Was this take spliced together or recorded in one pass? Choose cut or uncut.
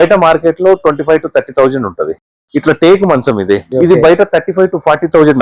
cut